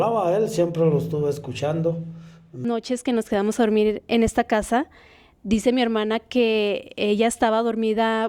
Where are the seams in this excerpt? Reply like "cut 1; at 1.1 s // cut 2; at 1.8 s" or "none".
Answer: cut 1; at 2.6 s

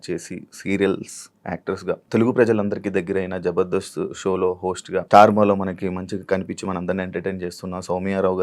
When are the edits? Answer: cut 1; at 2.0 s // cut 2; at 5.1 s

